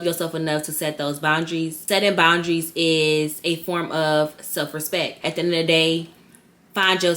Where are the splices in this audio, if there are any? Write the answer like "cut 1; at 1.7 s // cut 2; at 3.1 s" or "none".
cut 1; at 1.8 s // cut 2; at 5.2 s